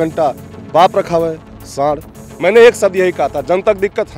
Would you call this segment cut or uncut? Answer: cut